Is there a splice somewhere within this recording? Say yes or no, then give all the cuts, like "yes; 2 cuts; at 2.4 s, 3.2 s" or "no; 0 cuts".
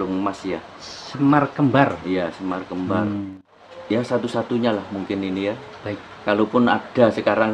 yes; 1 cut; at 3.3 s